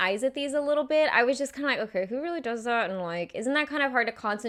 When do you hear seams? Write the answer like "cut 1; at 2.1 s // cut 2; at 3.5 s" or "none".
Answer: none